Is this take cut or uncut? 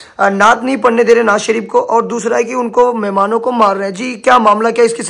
uncut